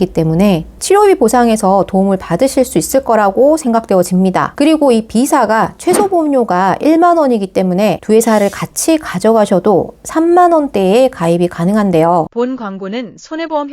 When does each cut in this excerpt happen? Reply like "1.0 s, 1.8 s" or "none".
12.3 s